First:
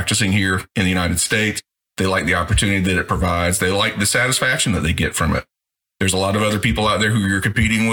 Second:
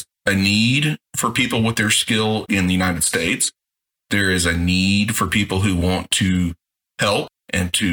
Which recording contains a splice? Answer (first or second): first